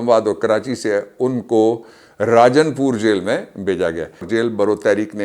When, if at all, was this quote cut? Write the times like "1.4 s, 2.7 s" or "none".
4.3 s

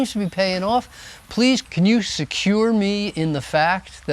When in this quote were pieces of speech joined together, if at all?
1.6 s

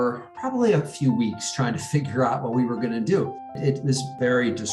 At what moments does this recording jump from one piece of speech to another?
3.6 s

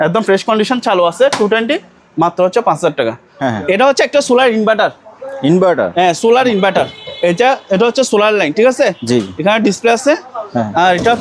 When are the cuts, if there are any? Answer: 3.3 s

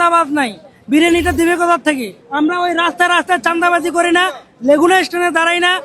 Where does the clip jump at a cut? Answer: 2.2 s

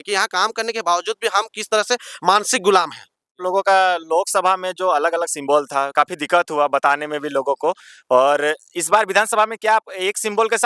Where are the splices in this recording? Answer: 3.4 s

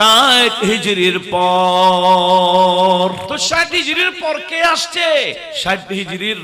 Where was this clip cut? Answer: 3.3 s, 5.5 s

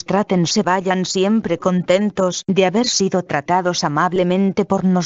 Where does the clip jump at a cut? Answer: 3.7 s

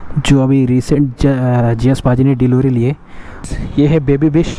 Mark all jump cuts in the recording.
3.5 s

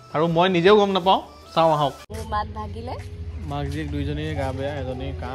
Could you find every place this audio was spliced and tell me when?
2.1 s

